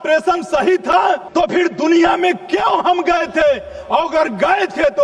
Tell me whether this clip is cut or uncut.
cut